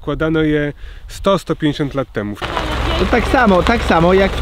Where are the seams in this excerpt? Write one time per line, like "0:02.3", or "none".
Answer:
0:02.4